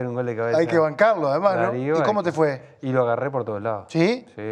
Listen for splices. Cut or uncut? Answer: uncut